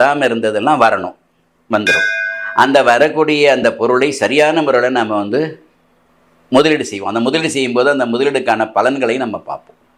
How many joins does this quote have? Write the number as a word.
zero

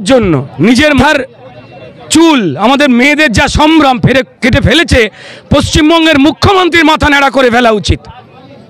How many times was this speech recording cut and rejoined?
one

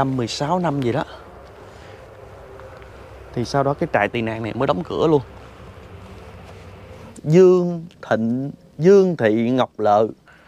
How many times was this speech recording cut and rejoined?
one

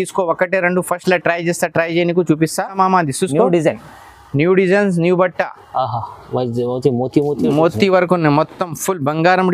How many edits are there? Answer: one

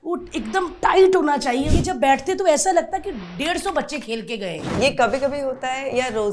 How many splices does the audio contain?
two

